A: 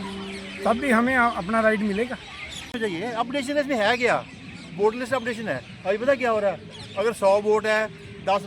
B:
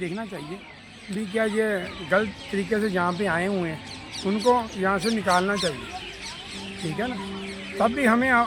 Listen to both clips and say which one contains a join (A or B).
A